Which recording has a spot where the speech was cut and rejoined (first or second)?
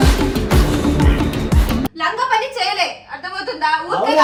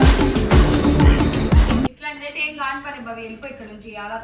second